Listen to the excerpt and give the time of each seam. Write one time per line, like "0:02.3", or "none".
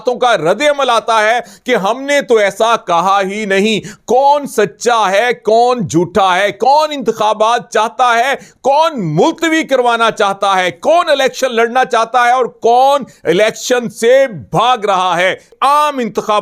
0:15.5

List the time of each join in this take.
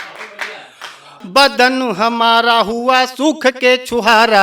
0:01.1

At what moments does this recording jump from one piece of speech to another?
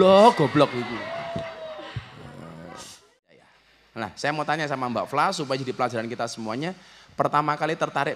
0:03.4

